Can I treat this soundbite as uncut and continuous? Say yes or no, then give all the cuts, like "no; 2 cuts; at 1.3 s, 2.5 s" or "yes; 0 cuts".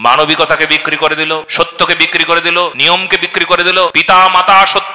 no; 3 cuts; at 1.5 s, 2.8 s, 4.0 s